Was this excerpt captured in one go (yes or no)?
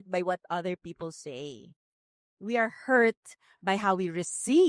yes